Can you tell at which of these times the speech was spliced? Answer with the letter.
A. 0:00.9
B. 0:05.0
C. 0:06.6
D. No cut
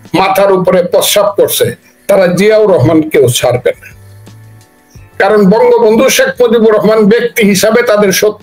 D